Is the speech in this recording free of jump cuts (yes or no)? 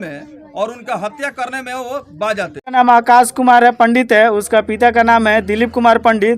no